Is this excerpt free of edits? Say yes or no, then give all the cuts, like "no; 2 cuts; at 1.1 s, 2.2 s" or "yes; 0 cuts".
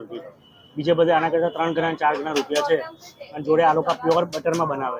yes; 0 cuts